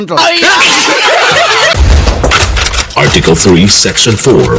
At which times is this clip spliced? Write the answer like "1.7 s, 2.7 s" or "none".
1.8 s